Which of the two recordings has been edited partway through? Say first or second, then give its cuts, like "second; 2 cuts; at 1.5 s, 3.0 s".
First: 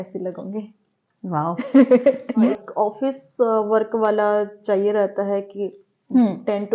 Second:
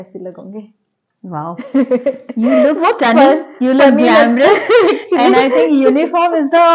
first; 1 cut; at 2.5 s